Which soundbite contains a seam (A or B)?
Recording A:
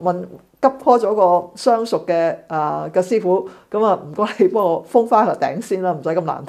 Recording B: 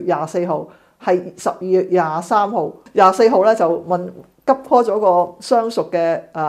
B